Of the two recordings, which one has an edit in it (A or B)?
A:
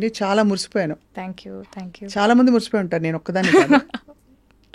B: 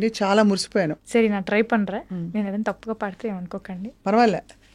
B